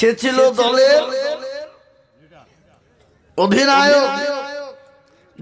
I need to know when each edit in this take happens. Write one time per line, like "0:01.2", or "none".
none